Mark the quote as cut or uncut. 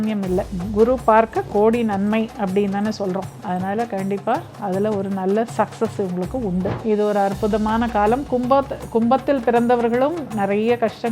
cut